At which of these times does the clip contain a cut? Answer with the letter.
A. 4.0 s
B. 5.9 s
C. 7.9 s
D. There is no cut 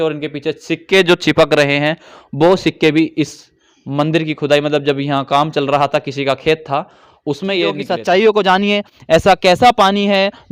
C